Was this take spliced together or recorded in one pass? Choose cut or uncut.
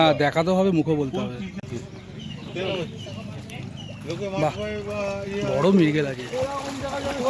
cut